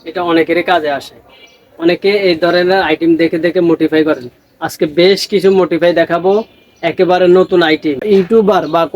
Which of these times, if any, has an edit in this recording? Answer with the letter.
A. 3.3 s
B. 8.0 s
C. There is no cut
B